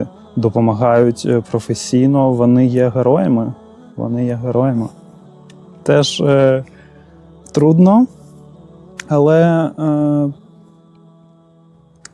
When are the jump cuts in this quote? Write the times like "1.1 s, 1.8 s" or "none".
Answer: none